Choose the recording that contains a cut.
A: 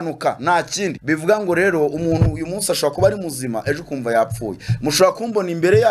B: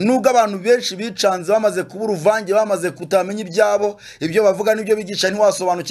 A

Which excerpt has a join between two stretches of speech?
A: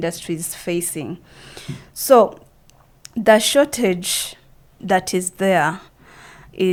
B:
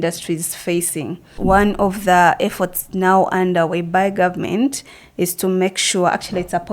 B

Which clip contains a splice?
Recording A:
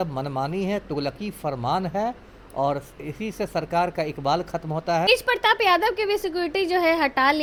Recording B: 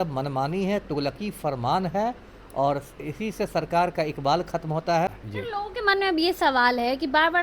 B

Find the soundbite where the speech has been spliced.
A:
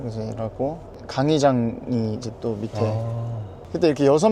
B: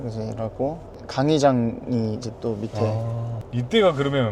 B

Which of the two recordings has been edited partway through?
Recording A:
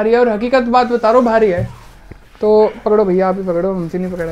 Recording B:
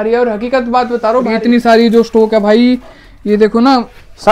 B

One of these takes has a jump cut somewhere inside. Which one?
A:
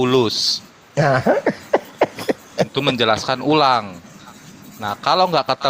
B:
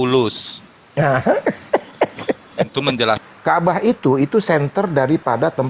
B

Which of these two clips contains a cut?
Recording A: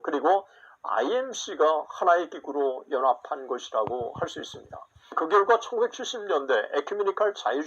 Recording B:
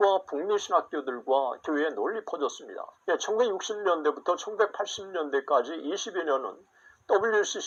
A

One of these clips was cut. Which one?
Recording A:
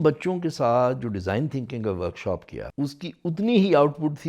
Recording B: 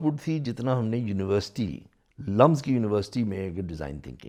A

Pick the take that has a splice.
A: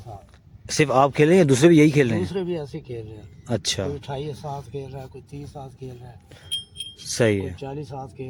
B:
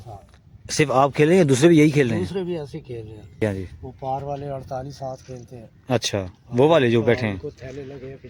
B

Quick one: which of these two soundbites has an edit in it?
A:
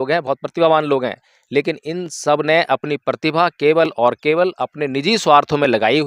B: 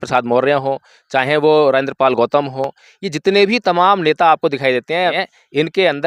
B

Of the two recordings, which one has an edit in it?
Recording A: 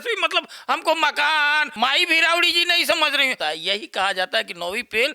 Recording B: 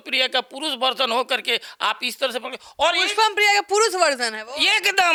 A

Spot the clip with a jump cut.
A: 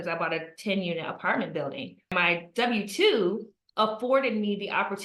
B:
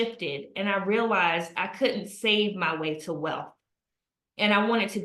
A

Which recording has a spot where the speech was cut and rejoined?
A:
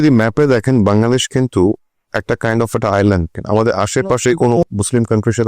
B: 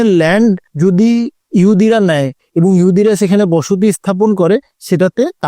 A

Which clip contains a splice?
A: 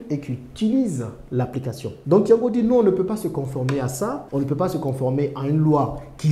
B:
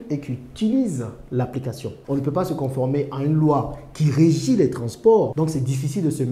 B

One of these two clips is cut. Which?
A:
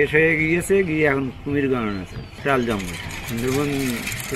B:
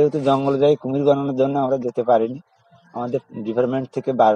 A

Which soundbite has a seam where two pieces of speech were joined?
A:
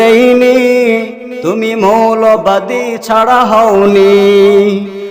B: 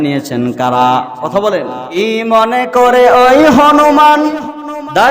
B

